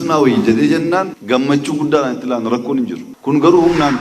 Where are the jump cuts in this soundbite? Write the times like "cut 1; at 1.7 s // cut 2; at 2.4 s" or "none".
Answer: cut 1; at 1.2 s // cut 2; at 3.1 s